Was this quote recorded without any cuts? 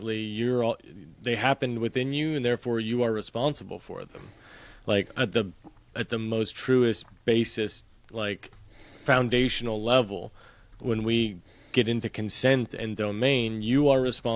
yes; 0 cuts

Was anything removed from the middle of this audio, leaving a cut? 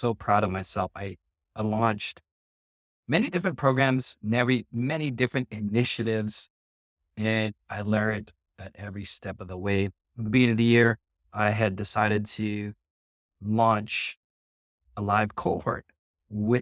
no; 0 cuts

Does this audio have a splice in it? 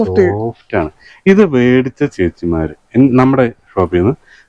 no; 0 cuts

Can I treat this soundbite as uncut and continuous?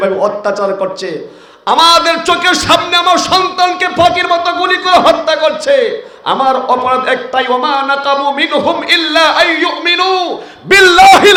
yes; 0 cuts

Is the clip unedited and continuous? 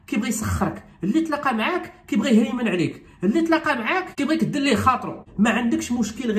no; 2 cuts; at 4.1 s, 5.1 s

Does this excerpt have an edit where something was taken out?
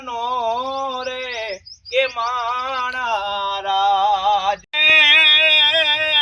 yes; 1 cut; at 4.7 s

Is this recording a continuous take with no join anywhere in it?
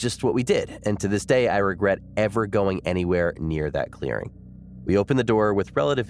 yes; 0 cuts

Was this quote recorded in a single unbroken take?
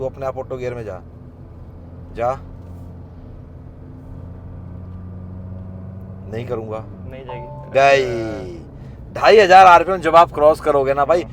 yes; 0 cuts

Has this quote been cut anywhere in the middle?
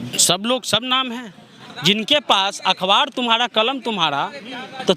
yes; 1 cut; at 1.6 s

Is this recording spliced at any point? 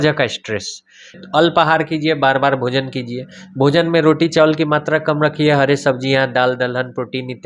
yes; 1 cut; at 1.2 s

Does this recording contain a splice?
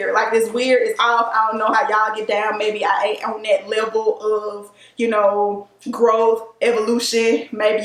no; 0 cuts

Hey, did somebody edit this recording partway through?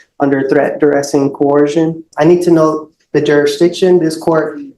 yes; 1 cut; at 2.1 s

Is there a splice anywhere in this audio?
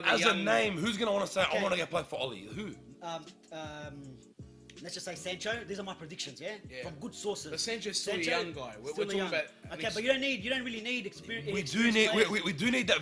no; 0 cuts

